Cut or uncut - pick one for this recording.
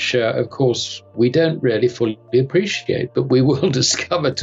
uncut